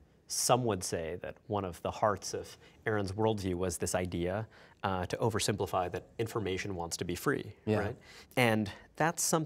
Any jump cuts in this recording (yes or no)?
yes